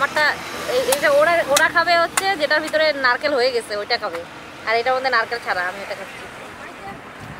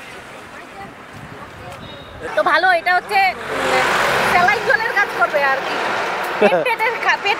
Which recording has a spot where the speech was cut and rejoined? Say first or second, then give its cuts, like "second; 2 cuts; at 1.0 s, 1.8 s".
second; 1 cut; at 2.3 s